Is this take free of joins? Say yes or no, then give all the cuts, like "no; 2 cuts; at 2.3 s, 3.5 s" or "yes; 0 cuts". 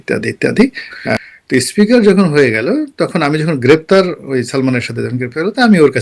no; 1 cut; at 1.1 s